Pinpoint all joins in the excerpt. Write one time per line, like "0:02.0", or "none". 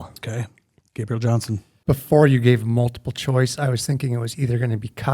0:01.7